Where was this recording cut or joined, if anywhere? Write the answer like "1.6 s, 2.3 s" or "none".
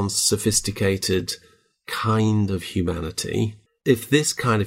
3.8 s